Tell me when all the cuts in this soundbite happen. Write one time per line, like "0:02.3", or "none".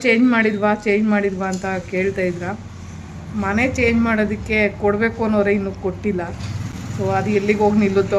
none